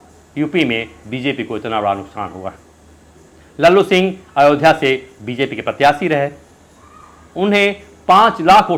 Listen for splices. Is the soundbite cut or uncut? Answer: uncut